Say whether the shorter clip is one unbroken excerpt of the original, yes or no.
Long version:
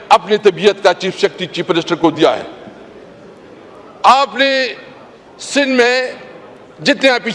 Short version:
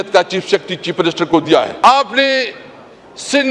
no